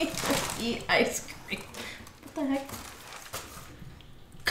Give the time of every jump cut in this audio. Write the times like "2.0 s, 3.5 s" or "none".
none